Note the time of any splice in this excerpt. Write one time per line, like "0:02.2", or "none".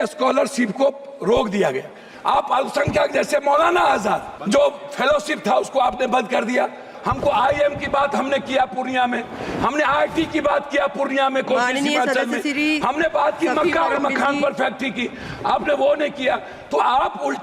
0:02.1
0:04.3
0:06.9